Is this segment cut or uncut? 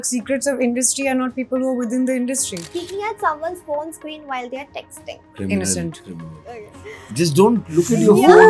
cut